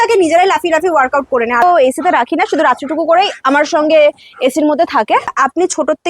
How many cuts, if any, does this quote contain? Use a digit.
2